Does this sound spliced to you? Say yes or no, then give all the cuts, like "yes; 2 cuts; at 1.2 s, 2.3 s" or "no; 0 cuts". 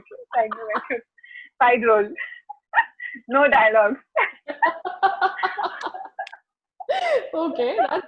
no; 0 cuts